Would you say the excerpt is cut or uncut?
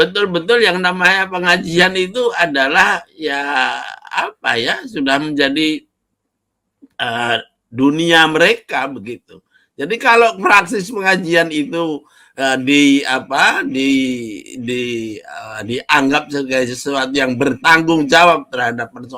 uncut